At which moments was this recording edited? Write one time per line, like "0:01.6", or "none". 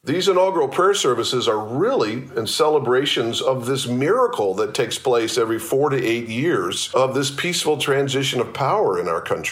0:06.8